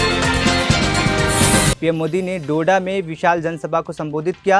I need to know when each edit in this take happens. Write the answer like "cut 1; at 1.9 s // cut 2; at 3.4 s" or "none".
cut 1; at 1.7 s